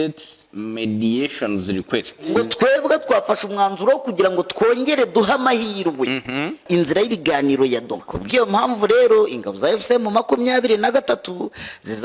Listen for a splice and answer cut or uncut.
cut